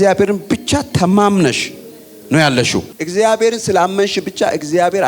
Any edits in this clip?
no; 0 cuts

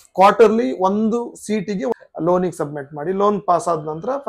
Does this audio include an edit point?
yes; 1 cut; at 1.9 s

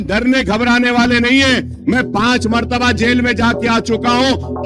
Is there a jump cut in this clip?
no; 0 cuts

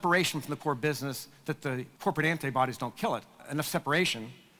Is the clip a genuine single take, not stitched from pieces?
no; 2 cuts; at 1.9 s, 3.4 s

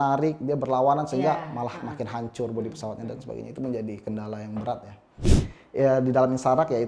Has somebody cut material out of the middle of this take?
yes; 1 cut; at 5.3 s

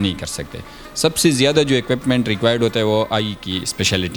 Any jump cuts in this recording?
no; 0 cuts

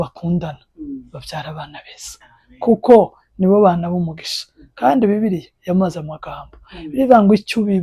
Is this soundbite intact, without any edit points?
yes; 0 cuts

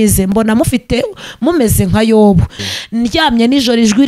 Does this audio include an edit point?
yes; 1 cut; at 2.6 s

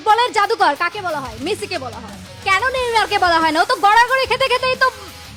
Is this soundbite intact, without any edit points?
yes; 0 cuts

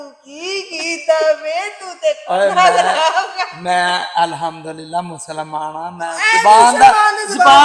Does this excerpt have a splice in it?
no; 0 cuts

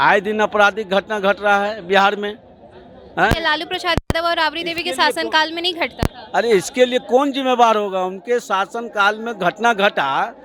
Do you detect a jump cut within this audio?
no; 0 cuts

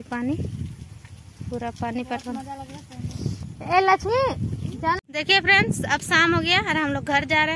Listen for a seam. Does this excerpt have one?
yes; 1 cut; at 5.0 s

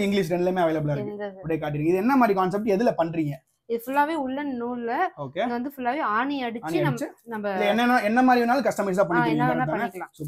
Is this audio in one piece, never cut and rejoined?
yes; 0 cuts

